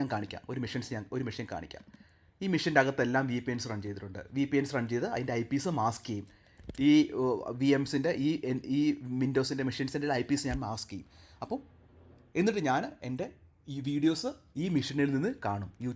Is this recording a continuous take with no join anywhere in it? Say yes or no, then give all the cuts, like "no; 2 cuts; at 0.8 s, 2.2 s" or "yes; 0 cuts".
yes; 0 cuts